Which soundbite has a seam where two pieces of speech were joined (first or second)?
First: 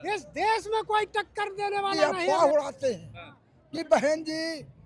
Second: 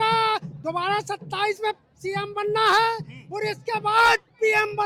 first